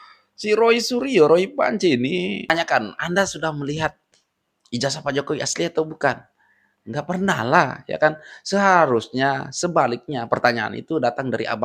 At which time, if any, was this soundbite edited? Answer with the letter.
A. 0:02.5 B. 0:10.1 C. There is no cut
A